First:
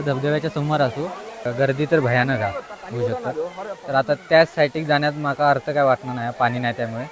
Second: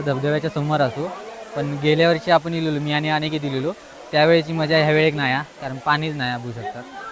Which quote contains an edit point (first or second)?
first